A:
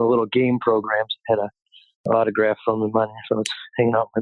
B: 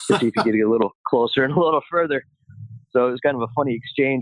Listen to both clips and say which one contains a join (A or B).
A